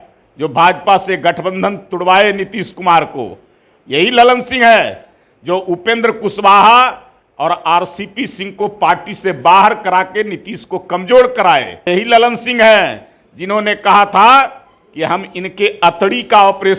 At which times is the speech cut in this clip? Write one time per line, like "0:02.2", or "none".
0:11.9